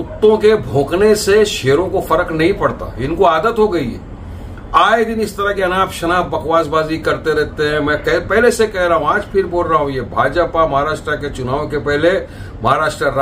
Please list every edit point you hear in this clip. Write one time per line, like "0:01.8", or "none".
none